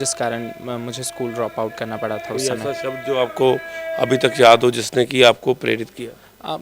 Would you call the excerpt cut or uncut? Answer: uncut